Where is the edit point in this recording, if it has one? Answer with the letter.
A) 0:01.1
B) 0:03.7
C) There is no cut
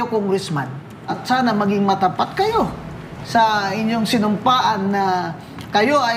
A